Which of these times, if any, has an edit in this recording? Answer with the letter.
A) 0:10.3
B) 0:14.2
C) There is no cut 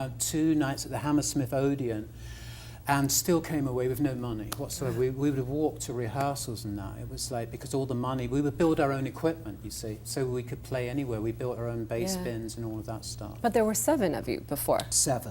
A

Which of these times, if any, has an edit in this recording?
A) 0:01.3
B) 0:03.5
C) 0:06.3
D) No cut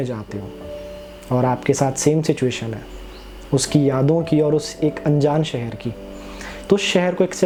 D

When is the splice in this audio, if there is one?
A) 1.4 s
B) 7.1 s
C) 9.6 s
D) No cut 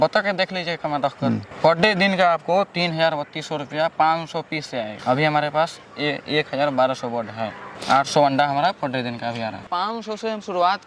C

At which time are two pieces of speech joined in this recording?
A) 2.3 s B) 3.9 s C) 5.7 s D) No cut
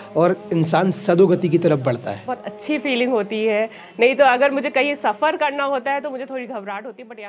A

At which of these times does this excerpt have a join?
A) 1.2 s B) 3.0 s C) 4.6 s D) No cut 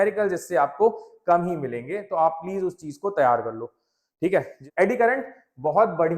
C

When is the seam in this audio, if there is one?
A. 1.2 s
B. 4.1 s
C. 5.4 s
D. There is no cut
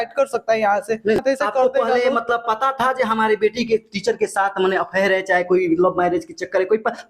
A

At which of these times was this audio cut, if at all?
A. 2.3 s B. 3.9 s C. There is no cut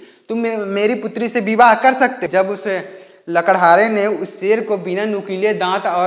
A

